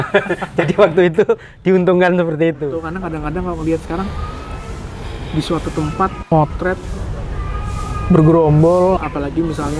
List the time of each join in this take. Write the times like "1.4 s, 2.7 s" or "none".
2.9 s